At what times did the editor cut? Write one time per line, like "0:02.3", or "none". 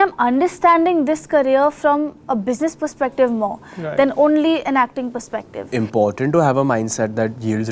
0:05.6